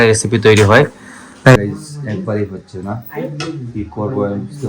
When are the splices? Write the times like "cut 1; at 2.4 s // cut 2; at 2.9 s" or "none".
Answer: cut 1; at 1.6 s